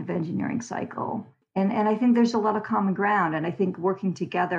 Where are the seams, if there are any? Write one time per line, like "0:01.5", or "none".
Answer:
none